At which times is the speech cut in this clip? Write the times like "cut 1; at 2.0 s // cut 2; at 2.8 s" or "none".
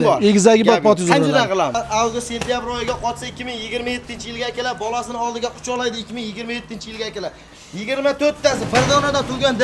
cut 1; at 1.8 s